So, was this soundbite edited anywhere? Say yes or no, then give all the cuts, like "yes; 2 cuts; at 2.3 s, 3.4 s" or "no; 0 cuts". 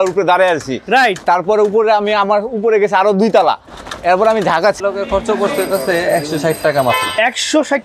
yes; 1 cut; at 4.8 s